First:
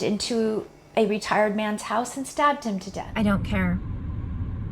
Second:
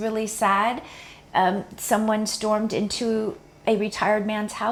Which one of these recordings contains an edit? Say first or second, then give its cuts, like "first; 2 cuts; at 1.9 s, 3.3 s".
first; 1 cut; at 3.0 s